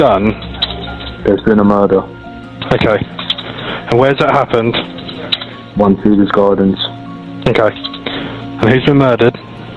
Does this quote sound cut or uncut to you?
uncut